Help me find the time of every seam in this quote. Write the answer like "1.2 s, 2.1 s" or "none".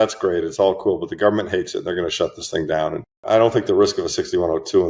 3.2 s

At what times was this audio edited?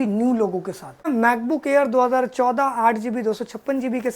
1.1 s

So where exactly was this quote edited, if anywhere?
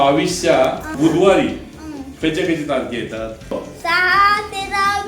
0.9 s, 3.5 s

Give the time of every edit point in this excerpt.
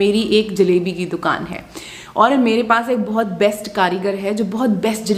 none

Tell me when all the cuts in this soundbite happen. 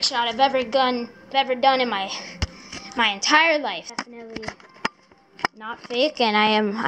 1.3 s, 3.8 s

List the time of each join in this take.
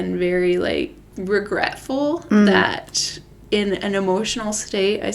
1.0 s

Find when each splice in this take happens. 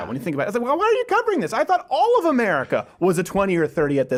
none

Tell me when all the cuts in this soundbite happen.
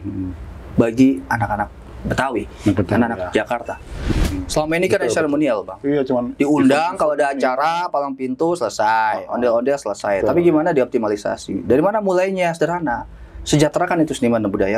4.1 s

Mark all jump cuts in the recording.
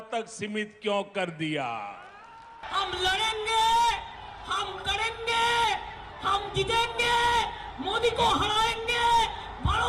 2.3 s

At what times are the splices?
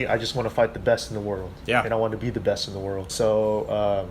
3.1 s

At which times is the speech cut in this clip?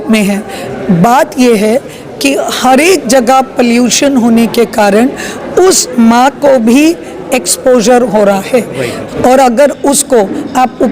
9.0 s

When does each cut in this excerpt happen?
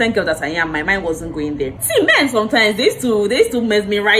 1.7 s

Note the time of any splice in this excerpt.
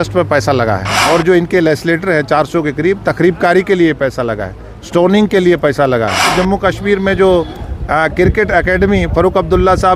0.9 s, 6.3 s

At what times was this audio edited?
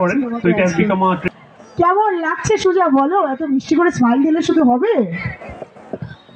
1.2 s

